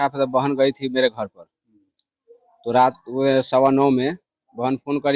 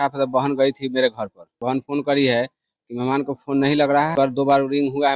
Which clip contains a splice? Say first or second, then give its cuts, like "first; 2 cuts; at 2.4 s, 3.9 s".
second; 2 cuts; at 1.7 s, 4.1 s